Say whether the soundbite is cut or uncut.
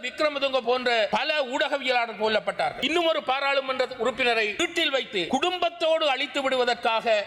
cut